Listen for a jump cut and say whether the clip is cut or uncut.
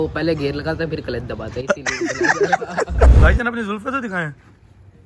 cut